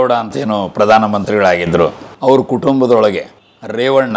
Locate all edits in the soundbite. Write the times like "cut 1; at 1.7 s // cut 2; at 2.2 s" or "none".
none